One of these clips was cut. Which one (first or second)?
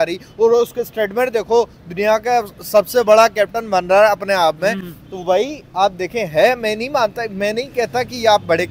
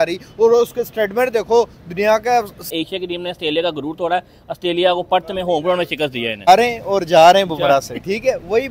second